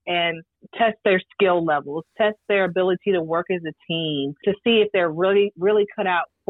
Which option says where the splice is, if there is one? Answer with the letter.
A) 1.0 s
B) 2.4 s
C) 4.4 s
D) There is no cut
C